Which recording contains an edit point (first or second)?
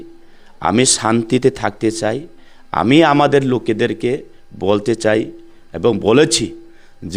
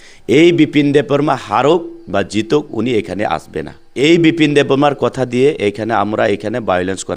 second